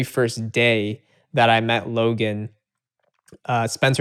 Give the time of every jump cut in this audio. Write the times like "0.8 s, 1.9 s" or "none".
none